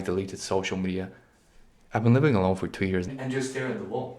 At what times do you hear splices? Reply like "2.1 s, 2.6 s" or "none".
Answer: 3.1 s